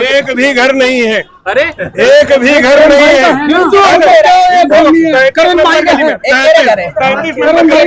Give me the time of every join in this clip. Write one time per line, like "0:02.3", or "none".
none